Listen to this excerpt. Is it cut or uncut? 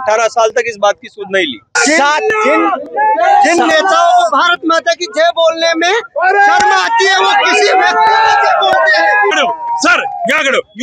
cut